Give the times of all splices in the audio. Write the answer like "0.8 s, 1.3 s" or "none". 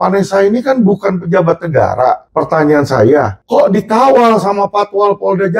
2.2 s, 3.4 s